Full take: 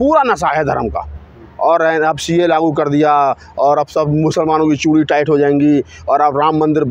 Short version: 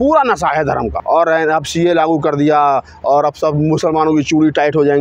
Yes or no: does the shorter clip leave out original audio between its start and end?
yes